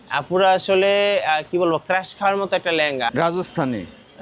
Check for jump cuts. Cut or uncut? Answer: cut